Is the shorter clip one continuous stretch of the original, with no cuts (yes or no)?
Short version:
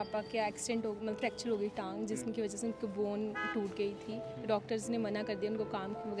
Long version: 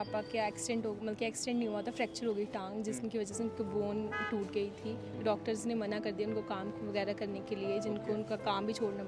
no